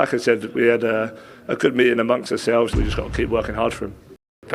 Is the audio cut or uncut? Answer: cut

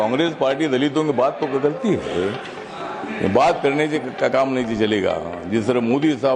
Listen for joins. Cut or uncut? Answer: uncut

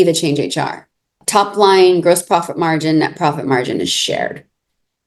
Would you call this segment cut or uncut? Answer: cut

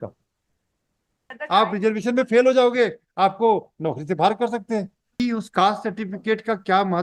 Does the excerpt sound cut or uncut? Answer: cut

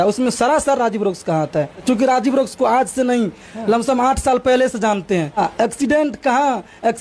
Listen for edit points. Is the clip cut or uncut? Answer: cut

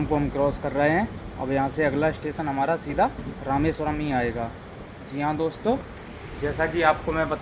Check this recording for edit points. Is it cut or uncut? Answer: uncut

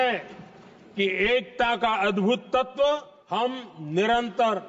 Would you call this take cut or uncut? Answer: cut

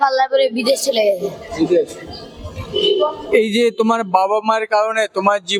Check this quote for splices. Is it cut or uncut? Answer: uncut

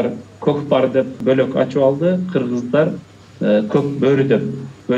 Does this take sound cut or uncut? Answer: uncut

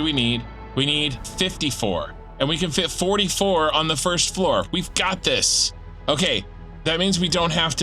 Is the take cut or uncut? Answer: cut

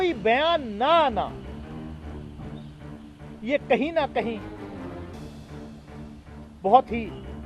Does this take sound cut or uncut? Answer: cut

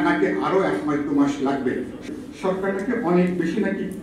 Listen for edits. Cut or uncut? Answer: cut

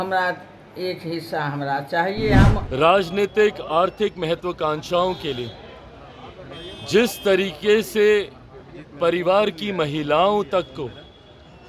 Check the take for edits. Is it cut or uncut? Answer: cut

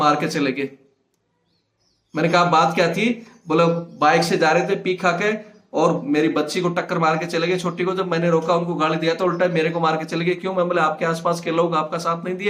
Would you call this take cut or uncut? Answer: uncut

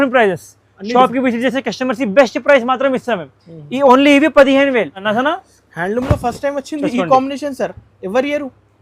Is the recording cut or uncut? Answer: cut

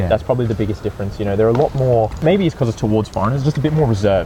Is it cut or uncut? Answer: uncut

